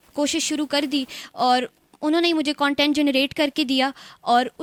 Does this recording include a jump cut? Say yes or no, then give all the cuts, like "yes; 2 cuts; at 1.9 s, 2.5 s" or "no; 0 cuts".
no; 0 cuts